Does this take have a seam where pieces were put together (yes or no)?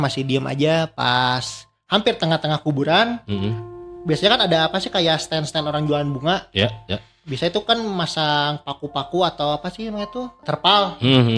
yes